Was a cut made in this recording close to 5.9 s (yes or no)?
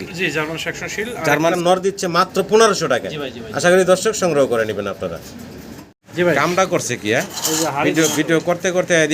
yes